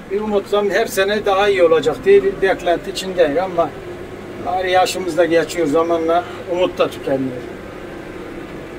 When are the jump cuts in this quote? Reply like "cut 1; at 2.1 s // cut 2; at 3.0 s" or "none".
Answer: none